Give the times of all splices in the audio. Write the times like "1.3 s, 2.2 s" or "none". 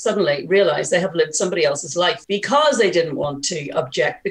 2.2 s